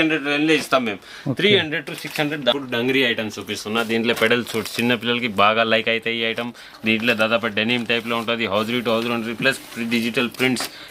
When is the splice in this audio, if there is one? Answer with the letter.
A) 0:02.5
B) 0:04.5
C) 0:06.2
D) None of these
A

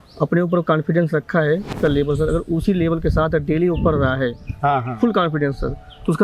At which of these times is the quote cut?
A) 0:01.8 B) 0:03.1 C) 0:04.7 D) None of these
A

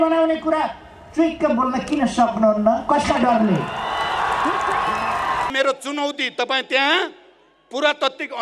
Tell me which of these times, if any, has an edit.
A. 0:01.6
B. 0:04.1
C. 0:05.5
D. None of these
C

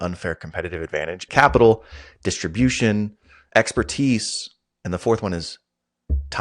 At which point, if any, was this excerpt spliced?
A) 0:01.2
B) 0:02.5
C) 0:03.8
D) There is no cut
A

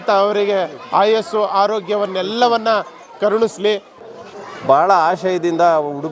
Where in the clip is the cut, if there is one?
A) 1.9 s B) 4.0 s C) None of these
B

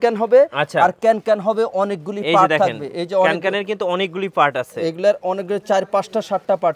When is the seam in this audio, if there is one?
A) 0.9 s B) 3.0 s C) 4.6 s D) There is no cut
D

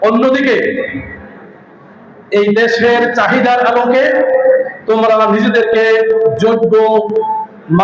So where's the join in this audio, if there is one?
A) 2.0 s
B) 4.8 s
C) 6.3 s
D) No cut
D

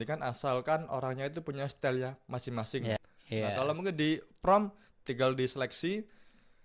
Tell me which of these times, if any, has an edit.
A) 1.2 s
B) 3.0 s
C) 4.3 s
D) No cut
B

